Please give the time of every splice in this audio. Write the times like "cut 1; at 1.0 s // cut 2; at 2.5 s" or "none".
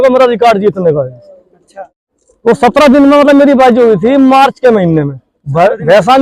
cut 1; at 2.0 s

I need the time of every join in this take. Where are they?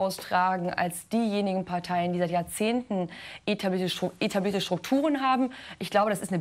cut 1; at 3.2 s

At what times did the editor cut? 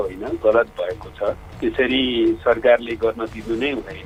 none

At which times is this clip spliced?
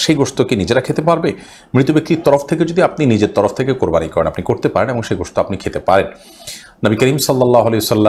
none

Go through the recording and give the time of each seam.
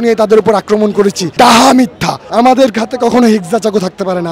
cut 1; at 2.1 s

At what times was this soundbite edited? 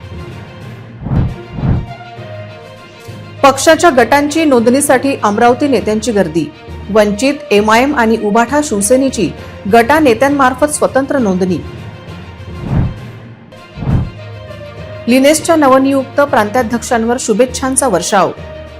cut 1; at 0.9 s

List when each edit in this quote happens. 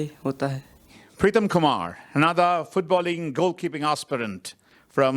cut 1; at 1.0 s

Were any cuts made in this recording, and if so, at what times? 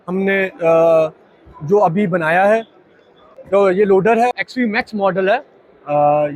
cut 1; at 3.4 s // cut 2; at 4.4 s

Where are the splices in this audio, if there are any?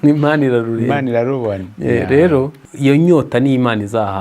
cut 1; at 2.6 s

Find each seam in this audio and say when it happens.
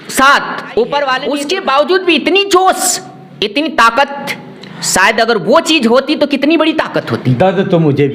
cut 1; at 1.3 s

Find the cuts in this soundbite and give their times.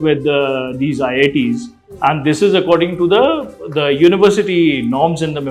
none

